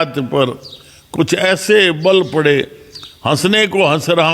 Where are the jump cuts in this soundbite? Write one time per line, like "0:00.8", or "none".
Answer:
none